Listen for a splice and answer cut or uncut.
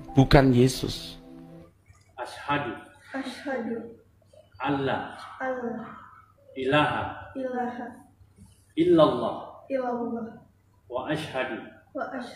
cut